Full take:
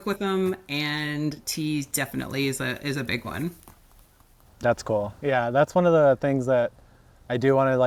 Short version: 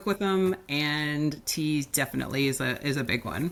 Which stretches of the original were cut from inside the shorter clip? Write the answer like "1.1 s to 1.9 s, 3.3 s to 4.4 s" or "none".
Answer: none